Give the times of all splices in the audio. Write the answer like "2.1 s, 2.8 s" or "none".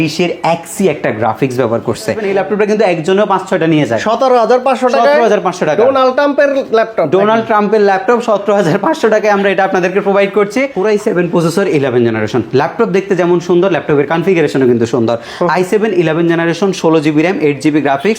2.2 s, 10.7 s